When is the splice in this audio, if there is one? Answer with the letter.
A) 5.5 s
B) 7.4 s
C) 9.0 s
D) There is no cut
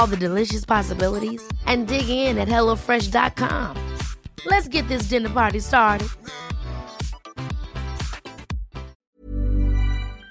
C